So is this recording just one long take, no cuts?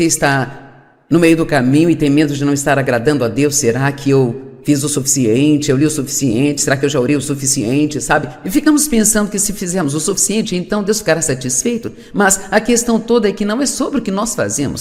yes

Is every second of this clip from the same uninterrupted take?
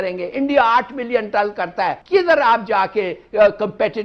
no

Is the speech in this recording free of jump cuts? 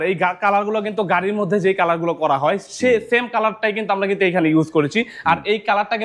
yes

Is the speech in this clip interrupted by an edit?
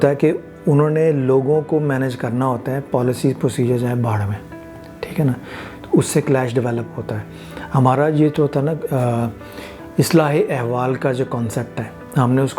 no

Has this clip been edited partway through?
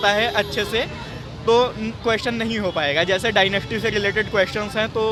no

